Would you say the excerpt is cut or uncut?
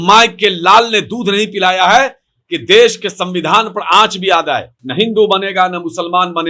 cut